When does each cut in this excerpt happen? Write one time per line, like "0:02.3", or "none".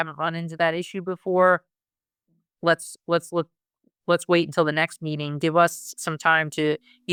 none